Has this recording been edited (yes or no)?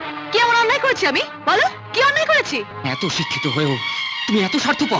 yes